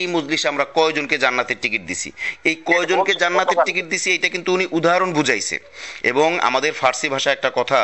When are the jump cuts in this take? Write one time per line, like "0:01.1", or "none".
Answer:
none